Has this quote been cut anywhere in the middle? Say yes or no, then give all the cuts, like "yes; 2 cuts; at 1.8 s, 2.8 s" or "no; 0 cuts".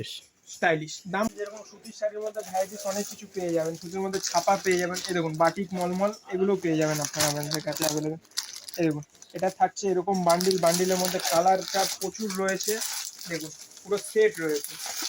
yes; 1 cut; at 1.3 s